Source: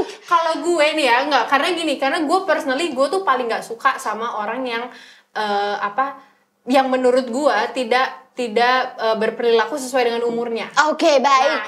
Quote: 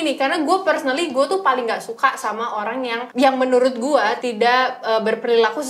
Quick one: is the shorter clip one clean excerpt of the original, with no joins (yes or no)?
no